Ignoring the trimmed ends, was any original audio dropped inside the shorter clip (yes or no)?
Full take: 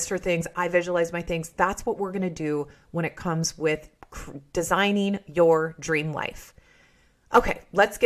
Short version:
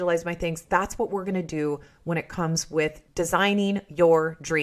yes